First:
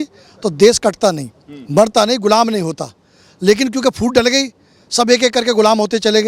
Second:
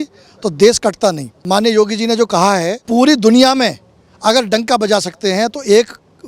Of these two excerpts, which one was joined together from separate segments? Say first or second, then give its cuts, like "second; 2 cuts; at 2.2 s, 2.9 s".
second; 2 cuts; at 1.3 s, 2.8 s